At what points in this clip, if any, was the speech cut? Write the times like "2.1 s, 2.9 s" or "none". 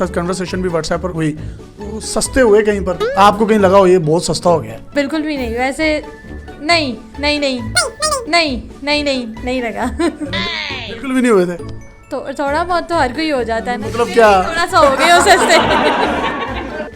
none